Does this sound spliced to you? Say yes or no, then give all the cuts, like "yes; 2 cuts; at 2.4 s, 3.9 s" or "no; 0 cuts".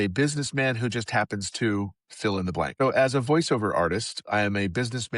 yes; 1 cut; at 2.7 s